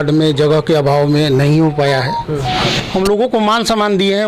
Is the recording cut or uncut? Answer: cut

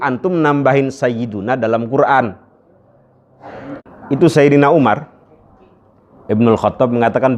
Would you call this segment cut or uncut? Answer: cut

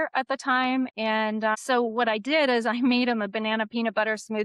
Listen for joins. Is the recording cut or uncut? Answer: uncut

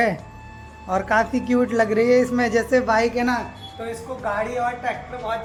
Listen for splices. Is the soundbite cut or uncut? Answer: uncut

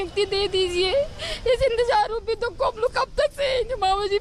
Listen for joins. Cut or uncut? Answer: cut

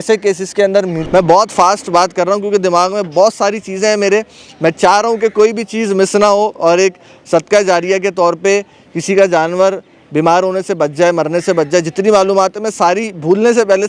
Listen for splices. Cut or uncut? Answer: cut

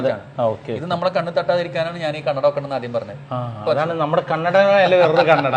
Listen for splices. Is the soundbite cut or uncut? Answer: uncut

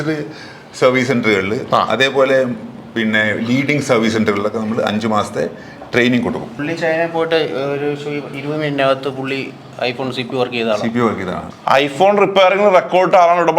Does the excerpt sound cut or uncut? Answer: cut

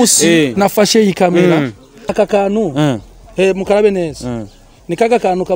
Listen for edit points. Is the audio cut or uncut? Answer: cut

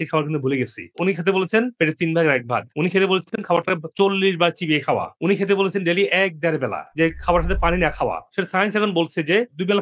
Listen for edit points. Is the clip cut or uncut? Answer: uncut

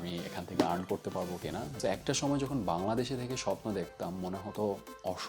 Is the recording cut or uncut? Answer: cut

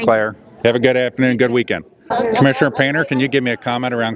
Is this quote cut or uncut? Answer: cut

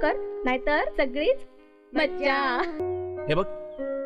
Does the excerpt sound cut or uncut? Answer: cut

